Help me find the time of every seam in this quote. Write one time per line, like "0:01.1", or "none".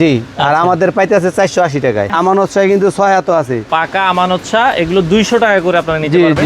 0:02.1
0:03.6